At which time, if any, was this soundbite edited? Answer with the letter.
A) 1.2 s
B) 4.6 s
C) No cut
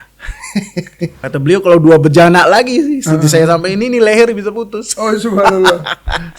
A